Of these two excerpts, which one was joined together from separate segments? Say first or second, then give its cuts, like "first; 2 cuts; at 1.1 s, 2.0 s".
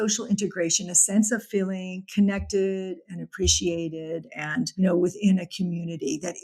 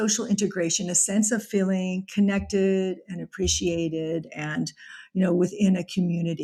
first; 1 cut; at 4.7 s